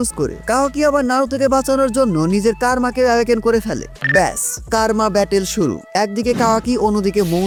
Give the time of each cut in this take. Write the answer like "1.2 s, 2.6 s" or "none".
none